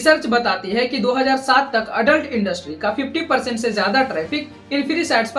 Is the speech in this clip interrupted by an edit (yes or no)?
no